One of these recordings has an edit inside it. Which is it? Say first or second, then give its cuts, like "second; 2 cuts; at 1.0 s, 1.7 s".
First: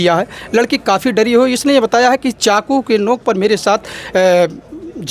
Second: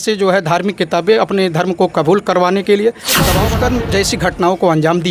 second; 1 cut; at 3.4 s